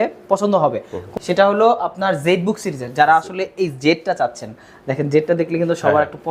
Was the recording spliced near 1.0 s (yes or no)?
yes